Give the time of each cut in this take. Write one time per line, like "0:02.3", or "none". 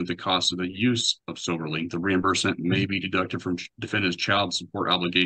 none

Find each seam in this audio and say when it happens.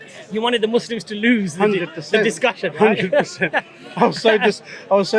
none

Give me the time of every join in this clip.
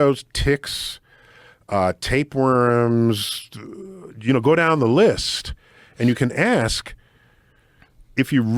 none

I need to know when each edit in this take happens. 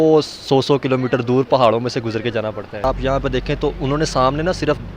0:02.8

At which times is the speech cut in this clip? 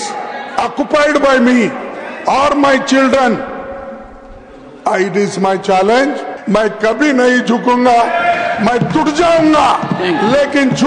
0:06.3

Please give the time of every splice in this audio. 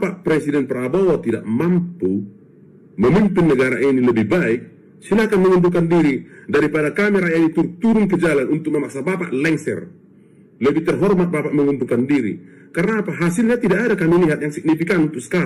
none

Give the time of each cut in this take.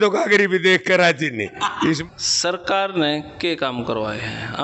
0:02.0

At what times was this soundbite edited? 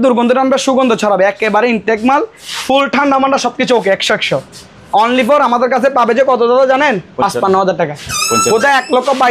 none

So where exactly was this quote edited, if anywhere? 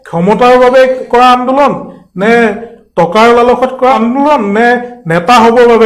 0:01.0
0:03.9

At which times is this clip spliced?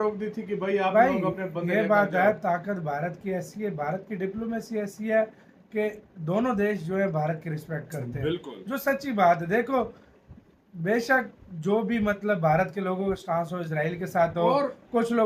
none

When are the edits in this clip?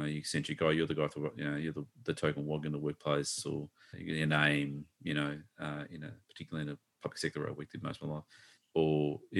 none

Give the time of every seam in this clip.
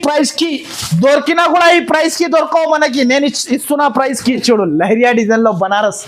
0:04.4

